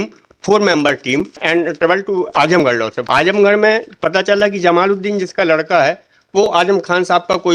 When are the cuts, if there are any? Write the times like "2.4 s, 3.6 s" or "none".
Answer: 1.4 s, 3.0 s